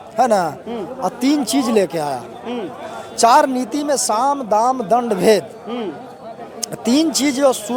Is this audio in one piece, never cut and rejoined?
yes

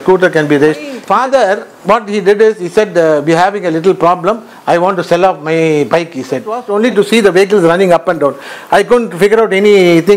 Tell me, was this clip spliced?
yes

